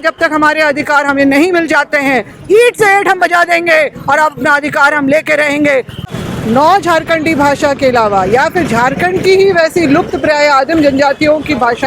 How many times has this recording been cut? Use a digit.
1